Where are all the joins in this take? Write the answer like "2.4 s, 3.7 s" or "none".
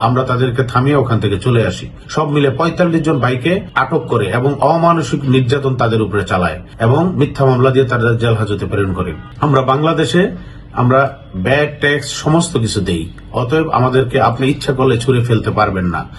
3.7 s, 6.6 s, 9.2 s